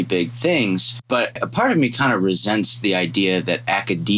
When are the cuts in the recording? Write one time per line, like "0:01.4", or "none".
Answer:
0:01.4